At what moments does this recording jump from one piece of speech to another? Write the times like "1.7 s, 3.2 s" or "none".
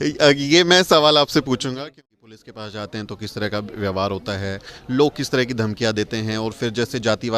1.7 s